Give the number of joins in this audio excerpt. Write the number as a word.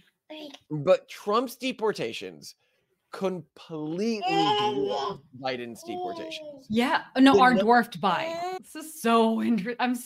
one